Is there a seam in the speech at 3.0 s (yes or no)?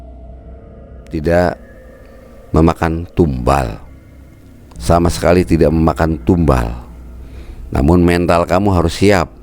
no